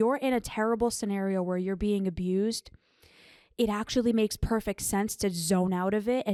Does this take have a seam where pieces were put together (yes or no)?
no